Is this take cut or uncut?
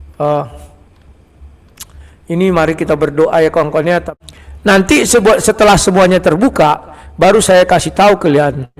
cut